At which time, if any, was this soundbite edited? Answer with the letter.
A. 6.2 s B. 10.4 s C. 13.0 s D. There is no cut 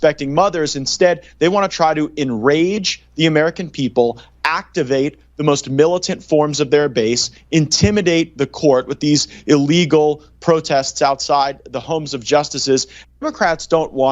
C